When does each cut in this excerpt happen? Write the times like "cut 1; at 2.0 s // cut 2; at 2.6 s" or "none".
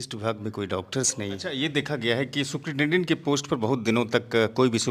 cut 1; at 1.5 s